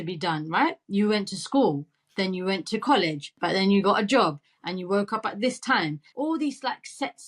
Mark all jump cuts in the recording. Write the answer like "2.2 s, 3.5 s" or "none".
3.4 s, 6.0 s